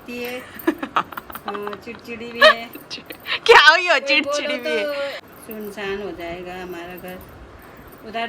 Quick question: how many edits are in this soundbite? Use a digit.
1